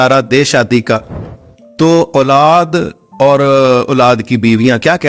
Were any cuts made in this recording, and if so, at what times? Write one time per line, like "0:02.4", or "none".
none